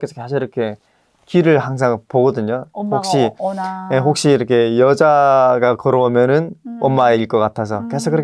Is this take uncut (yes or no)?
yes